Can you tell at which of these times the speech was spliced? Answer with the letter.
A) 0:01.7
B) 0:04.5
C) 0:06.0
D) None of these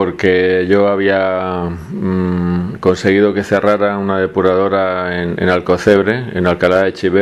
C